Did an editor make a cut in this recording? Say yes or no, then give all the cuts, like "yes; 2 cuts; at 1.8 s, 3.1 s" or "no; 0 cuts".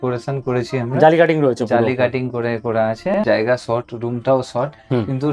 yes; 1 cut; at 3.1 s